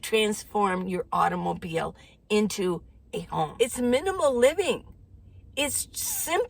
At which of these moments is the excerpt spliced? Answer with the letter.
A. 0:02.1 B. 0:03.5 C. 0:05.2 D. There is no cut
B